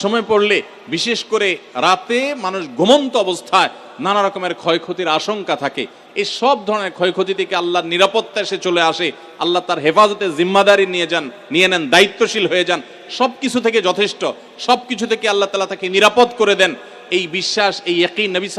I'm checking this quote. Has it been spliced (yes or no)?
no